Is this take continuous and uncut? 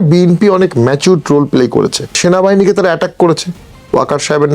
no; 1 cut; at 2.2 s

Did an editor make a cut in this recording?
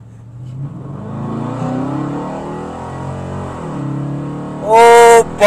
no; 0 cuts

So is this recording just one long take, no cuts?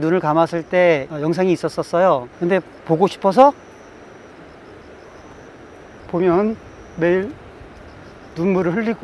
no; 1 cut; at 5.9 s

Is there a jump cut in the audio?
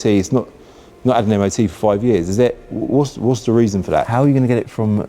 yes; 1 cut; at 4.1 s

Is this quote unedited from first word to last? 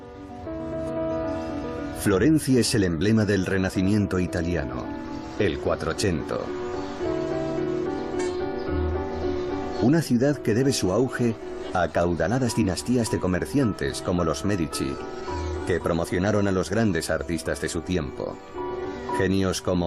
yes; 0 cuts

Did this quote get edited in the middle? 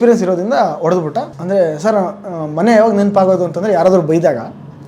yes; 1 cut; at 1.3 s

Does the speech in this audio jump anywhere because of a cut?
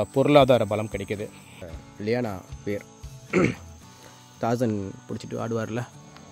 yes; 1 cut; at 1.7 s

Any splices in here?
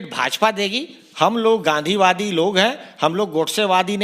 no; 0 cuts

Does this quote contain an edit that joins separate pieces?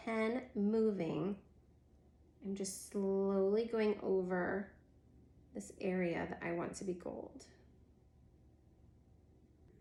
no; 0 cuts

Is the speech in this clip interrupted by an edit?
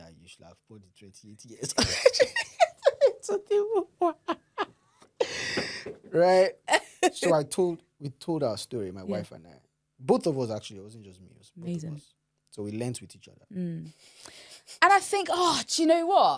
no; 0 cuts

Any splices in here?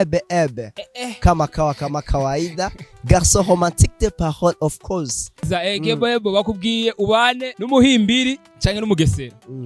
yes; 3 cuts; at 5.4 s, 7.5 s, 8.5 s

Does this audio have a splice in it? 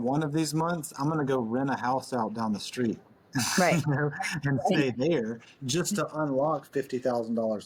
no; 0 cuts

